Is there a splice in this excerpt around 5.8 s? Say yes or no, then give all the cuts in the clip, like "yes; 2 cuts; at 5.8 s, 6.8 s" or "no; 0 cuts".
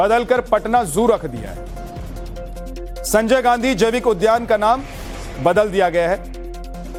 no; 0 cuts